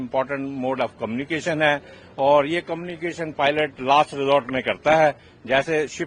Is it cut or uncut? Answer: uncut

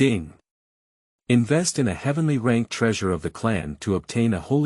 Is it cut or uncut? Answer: cut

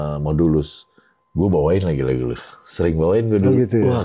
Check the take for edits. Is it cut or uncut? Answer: uncut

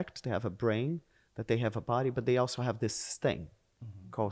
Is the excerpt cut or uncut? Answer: uncut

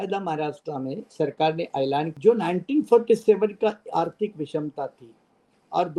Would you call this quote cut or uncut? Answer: cut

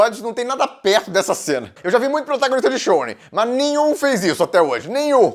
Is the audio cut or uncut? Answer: cut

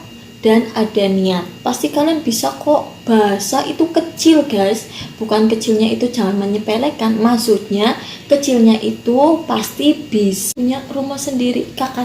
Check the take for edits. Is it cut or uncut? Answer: cut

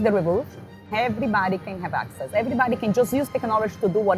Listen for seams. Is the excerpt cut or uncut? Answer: cut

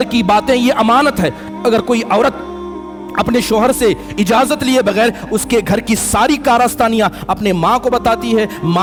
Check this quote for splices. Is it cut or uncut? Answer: uncut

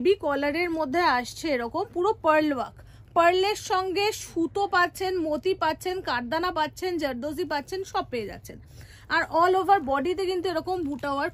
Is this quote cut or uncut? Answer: uncut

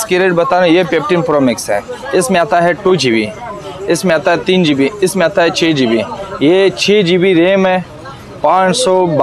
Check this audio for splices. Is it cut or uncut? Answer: uncut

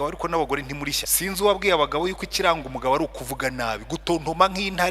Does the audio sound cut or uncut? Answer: cut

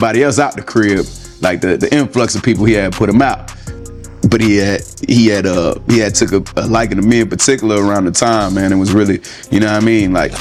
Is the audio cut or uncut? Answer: uncut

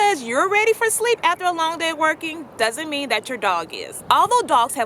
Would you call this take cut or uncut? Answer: uncut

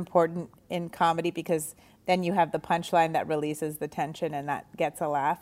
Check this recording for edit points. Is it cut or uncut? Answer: uncut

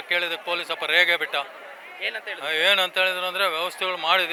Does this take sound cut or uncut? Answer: uncut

